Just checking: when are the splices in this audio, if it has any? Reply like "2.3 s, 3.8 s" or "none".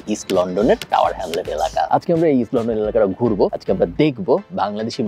1.9 s